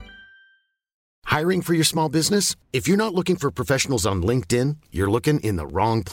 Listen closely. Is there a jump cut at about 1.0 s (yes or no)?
yes